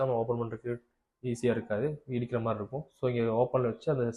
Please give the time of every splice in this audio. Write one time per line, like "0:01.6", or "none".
none